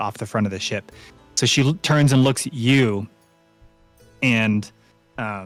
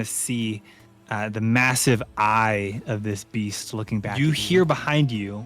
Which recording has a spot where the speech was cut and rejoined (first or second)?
second